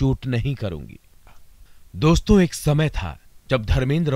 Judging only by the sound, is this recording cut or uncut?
cut